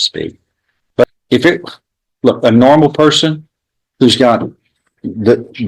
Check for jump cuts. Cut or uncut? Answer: cut